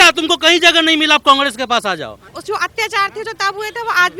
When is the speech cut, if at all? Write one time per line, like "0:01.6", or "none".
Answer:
0:02.3